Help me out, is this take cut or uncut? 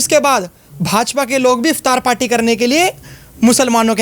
uncut